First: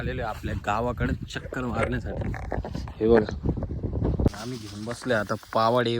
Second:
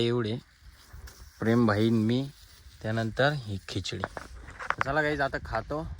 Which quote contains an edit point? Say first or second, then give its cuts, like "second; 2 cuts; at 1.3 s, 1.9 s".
first; 1 cut; at 4.3 s